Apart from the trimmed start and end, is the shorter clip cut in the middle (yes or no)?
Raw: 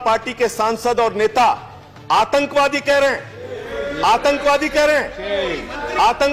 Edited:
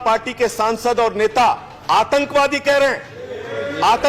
yes